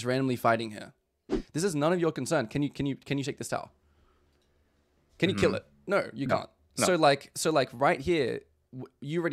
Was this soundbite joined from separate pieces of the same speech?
yes; 1 cut; at 1.4 s

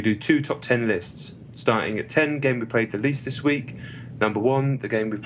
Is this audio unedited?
yes; 0 cuts

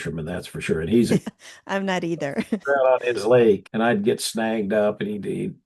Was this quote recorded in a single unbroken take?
no; 2 cuts; at 1.2 s, 3.7 s

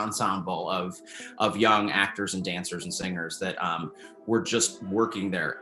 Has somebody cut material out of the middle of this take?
no; 0 cuts

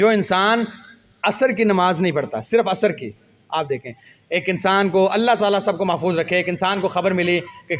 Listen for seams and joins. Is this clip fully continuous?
yes; 0 cuts

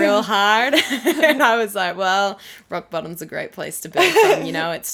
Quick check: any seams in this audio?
no; 0 cuts

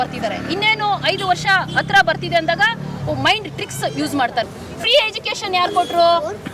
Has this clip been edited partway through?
yes; 1 cut; at 4.4 s

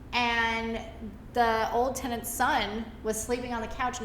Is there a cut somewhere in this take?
no; 0 cuts

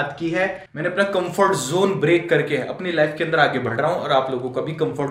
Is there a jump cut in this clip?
no; 0 cuts

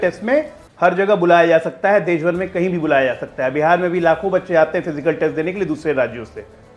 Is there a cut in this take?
no; 0 cuts

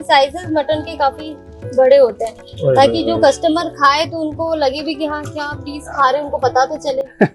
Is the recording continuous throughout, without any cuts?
yes; 0 cuts

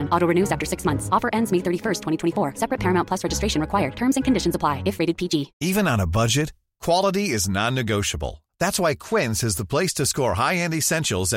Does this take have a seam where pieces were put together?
yes; 1 cut; at 5.5 s

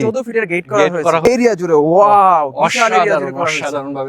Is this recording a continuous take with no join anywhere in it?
no; 1 cut; at 1.2 s

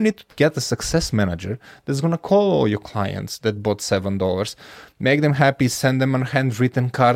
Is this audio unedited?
yes; 0 cuts

